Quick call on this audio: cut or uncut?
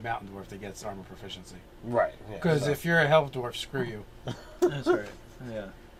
uncut